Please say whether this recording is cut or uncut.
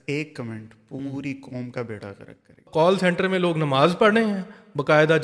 cut